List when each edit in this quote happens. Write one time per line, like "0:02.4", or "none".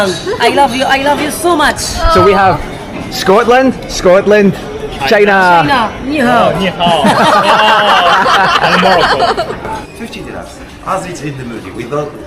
0:09.7